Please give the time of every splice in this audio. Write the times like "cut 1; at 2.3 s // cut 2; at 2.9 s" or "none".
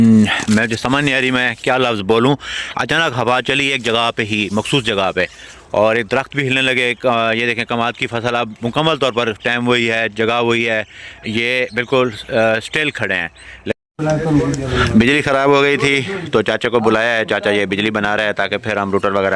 cut 1; at 13.7 s